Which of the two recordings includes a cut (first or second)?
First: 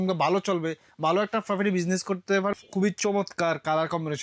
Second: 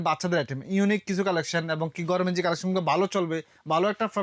first